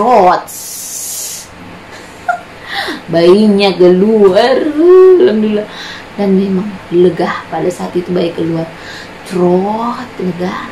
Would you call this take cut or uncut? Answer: uncut